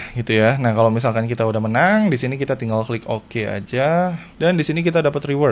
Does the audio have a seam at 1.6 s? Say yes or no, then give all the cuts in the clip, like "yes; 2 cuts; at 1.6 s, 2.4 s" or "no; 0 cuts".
no; 1 cut; at 4.3 s